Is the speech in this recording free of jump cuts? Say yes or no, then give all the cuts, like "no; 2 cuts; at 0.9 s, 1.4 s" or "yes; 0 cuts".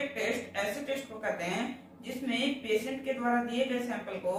yes; 0 cuts